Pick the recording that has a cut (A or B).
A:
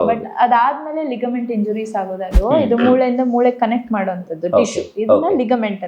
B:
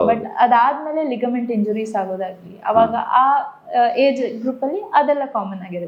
A